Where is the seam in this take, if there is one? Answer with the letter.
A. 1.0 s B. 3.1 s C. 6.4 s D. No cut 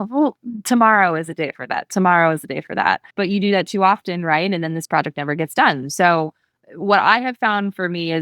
B